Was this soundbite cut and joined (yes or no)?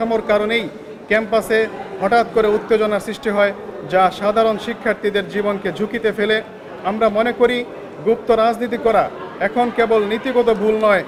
no